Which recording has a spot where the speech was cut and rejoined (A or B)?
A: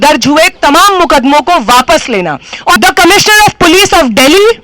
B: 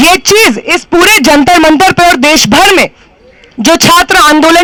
A